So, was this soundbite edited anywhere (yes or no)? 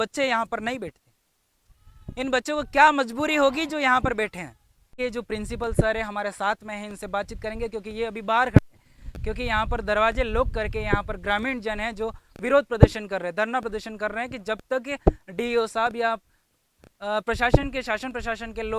yes